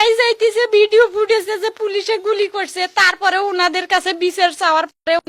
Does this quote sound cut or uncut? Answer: uncut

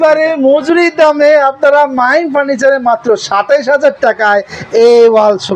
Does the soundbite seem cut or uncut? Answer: uncut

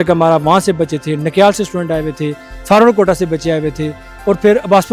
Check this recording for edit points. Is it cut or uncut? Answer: uncut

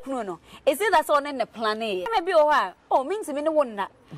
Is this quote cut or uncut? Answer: cut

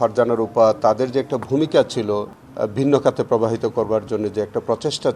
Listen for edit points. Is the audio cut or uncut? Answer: cut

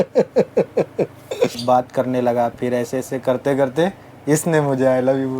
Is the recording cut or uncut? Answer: cut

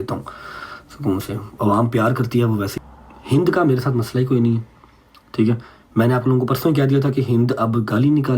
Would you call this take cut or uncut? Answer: cut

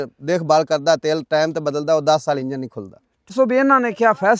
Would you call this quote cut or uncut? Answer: cut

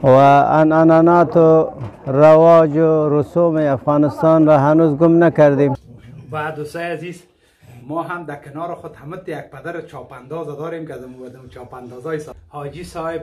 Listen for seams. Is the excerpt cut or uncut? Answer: cut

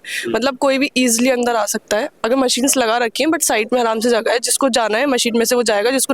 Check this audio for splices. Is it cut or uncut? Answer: uncut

